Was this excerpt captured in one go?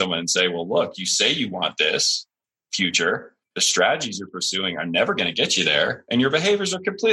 no; 1 cut; at 3.4 s

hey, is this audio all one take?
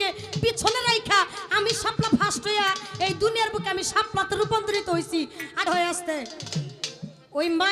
no; 1 cut; at 5.6 s

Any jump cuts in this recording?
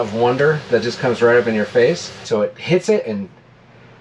yes; 1 cut; at 2.2 s

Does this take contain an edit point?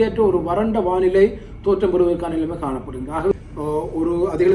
yes; 1 cut; at 3.3 s

